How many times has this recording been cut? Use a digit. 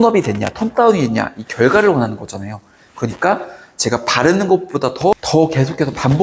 1